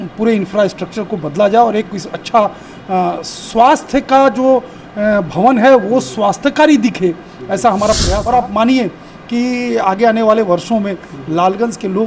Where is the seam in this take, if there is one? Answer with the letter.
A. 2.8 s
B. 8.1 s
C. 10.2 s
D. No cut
B